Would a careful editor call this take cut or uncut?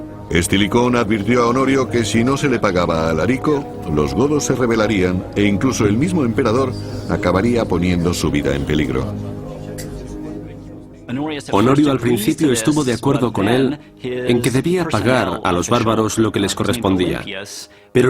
cut